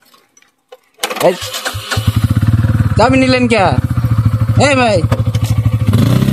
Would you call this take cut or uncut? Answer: uncut